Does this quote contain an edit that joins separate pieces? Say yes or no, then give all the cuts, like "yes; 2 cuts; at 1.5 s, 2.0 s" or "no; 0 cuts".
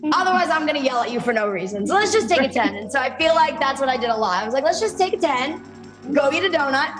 yes; 1 cut; at 6.0 s